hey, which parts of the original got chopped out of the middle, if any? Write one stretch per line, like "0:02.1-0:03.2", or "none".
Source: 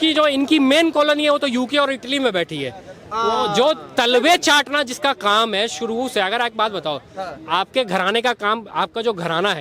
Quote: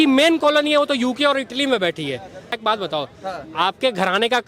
0:03.1-0:06.5